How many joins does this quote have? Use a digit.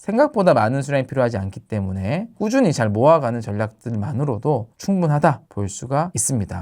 2